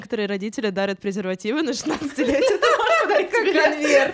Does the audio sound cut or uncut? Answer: uncut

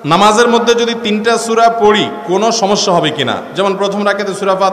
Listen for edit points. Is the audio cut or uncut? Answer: uncut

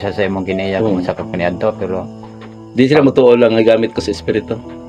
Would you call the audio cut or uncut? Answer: uncut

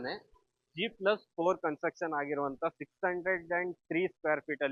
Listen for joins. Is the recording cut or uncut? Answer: uncut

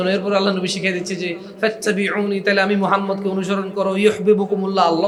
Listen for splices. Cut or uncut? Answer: uncut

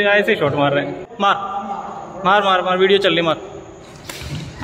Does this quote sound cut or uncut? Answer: cut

